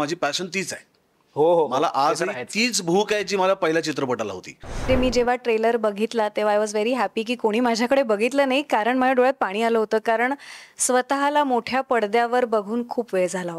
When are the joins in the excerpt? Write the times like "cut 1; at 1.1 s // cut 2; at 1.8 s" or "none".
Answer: cut 1; at 4.9 s